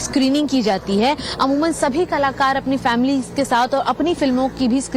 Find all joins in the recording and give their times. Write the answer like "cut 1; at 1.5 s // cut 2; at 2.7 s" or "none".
cut 1; at 3.6 s